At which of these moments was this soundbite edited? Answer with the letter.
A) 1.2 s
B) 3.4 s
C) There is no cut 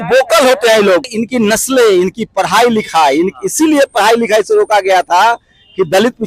A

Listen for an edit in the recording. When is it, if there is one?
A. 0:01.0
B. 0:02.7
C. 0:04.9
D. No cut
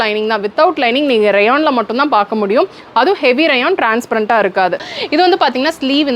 C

